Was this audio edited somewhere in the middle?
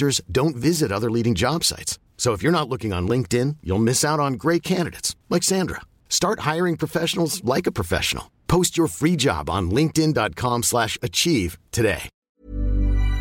yes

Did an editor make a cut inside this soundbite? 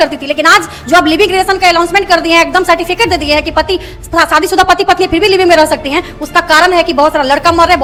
no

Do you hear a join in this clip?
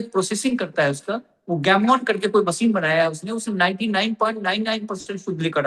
no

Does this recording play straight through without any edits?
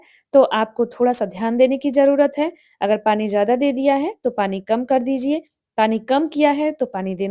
yes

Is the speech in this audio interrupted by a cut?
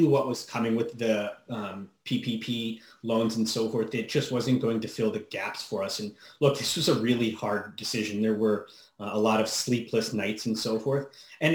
no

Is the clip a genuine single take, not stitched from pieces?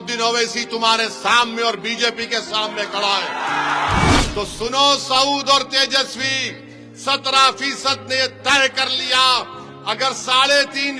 no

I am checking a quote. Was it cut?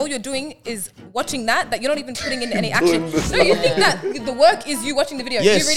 no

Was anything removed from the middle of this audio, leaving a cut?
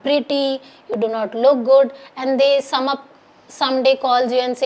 no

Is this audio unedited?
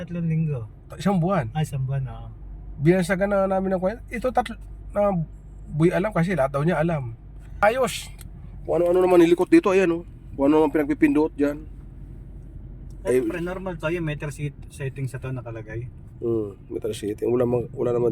no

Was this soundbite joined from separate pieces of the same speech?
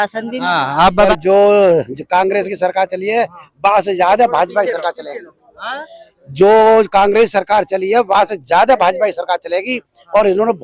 yes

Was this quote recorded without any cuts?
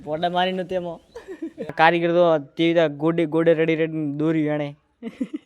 no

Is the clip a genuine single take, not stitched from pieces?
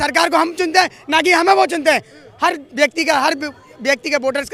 yes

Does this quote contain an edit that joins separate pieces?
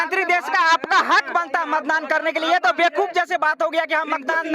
no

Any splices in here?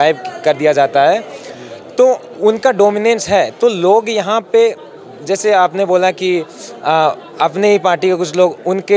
no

